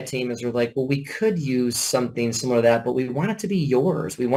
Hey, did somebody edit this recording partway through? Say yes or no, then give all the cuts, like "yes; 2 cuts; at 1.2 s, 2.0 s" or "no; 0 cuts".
no; 0 cuts